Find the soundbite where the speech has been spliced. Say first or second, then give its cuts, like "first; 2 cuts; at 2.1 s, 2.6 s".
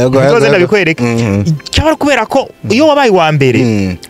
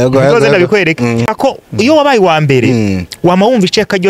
second; 1 cut; at 1.3 s